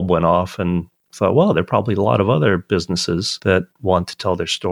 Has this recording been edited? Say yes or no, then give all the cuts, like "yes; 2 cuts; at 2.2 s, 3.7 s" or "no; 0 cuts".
yes; 1 cut; at 3.3 s